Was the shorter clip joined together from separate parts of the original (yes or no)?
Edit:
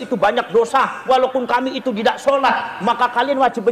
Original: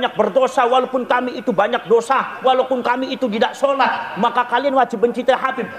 no